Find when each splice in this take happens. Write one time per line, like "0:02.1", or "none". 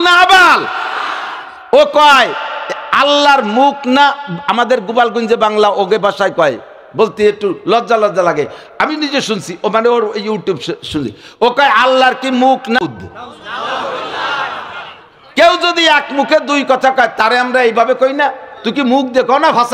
0:12.9